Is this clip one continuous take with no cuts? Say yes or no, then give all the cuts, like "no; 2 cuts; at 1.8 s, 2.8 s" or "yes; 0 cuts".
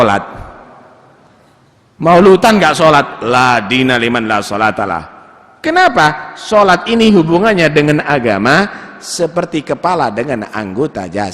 yes; 0 cuts